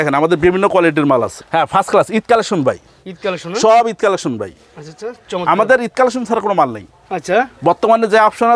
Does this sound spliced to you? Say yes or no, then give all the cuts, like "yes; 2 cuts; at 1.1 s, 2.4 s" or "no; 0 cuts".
no; 0 cuts